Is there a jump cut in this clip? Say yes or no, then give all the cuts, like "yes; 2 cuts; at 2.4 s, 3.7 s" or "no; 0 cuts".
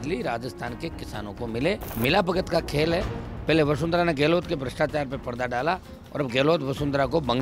yes; 1 cut; at 1.9 s